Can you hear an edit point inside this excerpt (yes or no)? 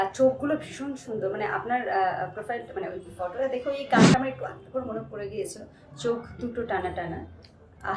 no